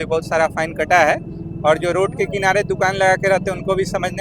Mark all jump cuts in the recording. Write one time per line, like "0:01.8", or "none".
none